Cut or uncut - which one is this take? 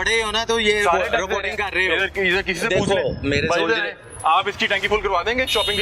uncut